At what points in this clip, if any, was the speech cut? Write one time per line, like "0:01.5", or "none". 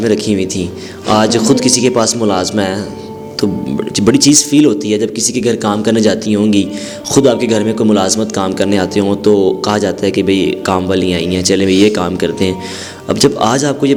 none

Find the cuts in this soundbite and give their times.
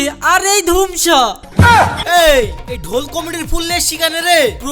0:02.0

